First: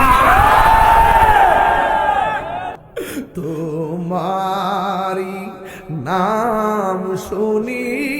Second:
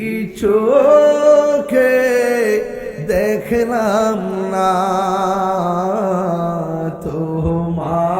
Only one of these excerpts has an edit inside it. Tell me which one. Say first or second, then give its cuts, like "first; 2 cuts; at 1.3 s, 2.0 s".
first; 1 cut; at 2.7 s